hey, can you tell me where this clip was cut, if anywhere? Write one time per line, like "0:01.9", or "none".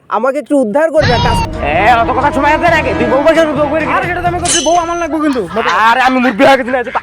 0:01.4